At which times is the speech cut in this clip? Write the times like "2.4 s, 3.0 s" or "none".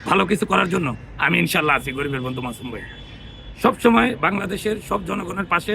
none

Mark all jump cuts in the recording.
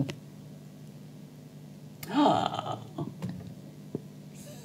none

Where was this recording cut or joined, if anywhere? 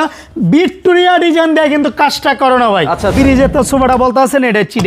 3.1 s

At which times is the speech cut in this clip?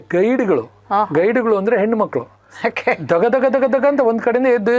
2.4 s

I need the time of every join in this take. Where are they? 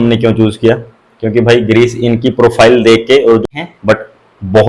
3.4 s

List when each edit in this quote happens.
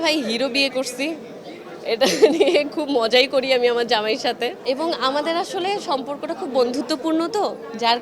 none

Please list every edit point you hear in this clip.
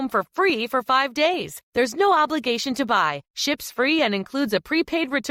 none

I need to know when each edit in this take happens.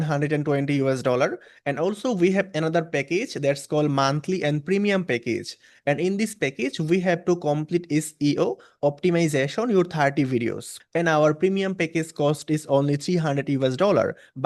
10.7 s

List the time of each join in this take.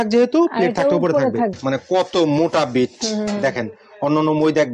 1.6 s

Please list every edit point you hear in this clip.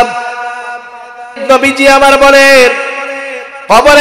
1.4 s

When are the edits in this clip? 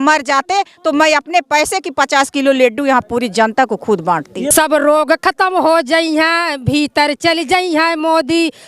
4.5 s

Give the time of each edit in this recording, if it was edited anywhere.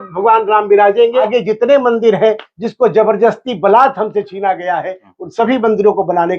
1.2 s

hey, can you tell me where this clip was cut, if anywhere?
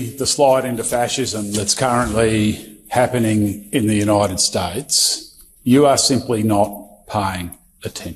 none

